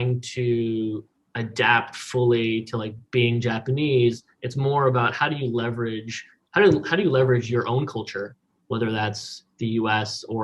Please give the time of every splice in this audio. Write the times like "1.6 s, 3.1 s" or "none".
none

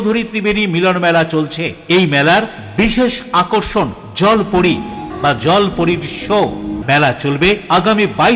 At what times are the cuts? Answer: 5.1 s, 6.8 s

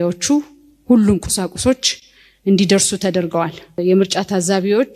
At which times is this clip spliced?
3.8 s

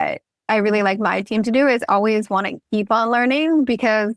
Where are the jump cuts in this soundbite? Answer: none

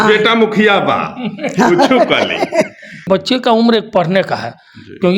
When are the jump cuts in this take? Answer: 3.0 s

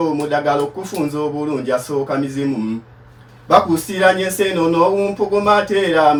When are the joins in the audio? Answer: none

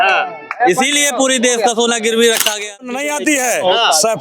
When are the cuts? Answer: 3.0 s

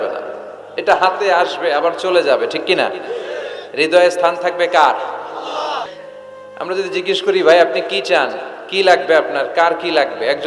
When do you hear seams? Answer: 5.9 s

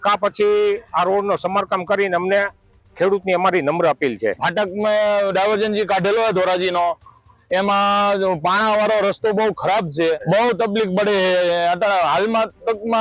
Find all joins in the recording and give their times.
4.4 s, 10.2 s

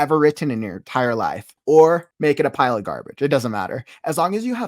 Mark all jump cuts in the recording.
1.5 s, 2.1 s

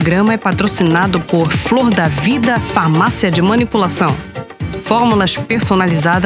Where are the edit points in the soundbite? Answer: none

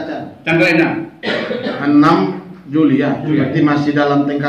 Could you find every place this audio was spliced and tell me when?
none

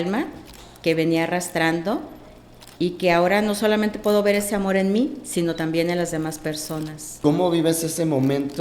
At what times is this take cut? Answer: 7.0 s

